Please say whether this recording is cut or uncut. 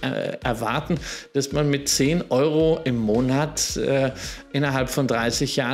uncut